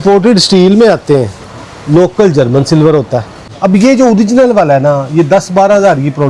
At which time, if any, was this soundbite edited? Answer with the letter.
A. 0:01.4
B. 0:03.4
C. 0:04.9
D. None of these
B